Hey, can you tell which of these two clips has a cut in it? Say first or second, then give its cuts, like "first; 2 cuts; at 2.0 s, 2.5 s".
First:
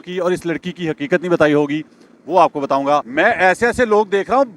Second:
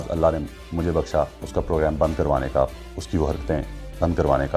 first; 1 cut; at 3.1 s